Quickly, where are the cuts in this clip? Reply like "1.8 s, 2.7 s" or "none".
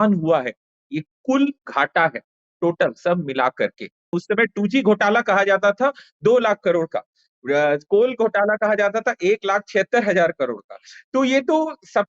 4.2 s